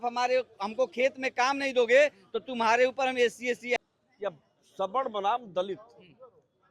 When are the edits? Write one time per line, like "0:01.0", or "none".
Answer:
0:03.8

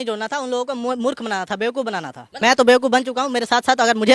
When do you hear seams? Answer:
0:02.2

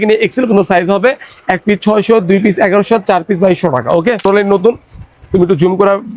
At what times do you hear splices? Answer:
0:04.2

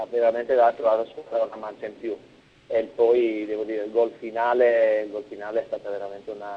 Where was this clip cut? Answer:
0:03.5

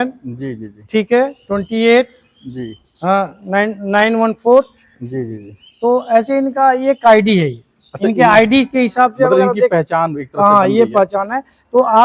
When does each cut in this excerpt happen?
none

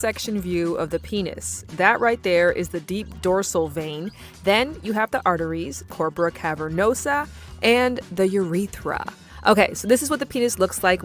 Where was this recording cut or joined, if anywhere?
none

